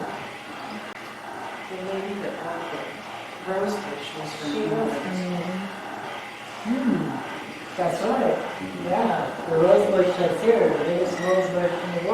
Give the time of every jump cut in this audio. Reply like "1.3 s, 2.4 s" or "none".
1.0 s

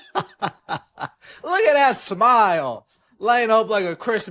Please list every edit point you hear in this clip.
none

